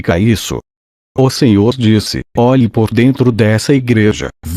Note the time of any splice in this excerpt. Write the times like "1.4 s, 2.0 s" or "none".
1.3 s